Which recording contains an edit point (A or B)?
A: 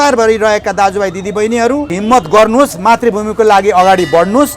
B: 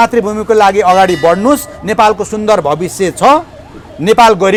A